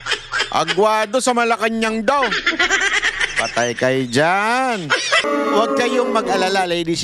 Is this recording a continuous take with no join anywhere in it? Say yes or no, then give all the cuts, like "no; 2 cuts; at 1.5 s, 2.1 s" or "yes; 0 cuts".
no; 1 cut; at 5.2 s